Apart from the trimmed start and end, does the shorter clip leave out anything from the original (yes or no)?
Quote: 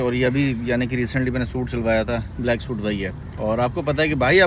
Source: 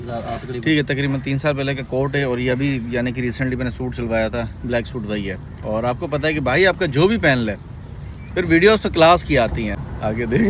no